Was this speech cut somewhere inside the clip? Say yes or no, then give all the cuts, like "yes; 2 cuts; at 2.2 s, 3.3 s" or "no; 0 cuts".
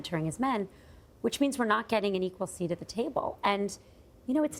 yes; 1 cut; at 3.6 s